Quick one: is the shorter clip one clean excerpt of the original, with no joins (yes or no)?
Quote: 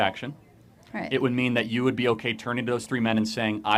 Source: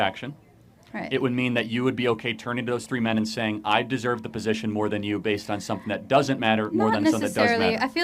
yes